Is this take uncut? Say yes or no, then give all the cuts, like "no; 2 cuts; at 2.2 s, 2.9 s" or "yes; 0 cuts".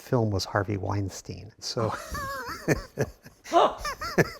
no; 1 cut; at 1.6 s